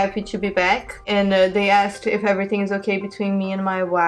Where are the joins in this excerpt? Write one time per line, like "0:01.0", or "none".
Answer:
0:01.0